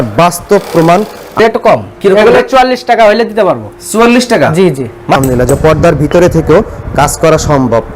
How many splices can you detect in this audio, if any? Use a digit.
2